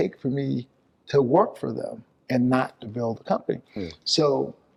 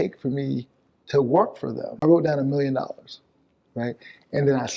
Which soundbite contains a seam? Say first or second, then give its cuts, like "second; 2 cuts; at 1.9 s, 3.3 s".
second; 1 cut; at 2.0 s